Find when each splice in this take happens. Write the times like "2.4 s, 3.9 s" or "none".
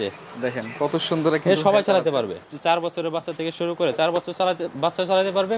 2.5 s